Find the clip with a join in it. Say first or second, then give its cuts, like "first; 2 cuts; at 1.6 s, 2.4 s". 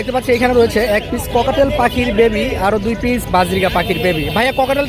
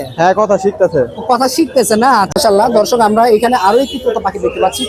second; 1 cut; at 2.3 s